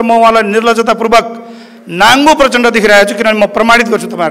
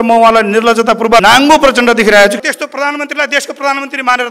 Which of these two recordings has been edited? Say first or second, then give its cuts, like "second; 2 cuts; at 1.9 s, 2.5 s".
second; 2 cuts; at 1.2 s, 2.4 s